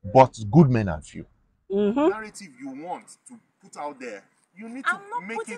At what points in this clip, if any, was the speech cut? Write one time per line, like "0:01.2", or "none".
0:02.3